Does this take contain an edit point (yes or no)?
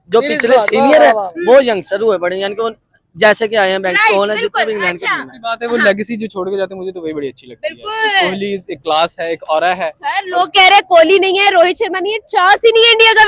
no